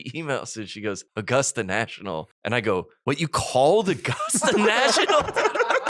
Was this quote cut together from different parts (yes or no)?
yes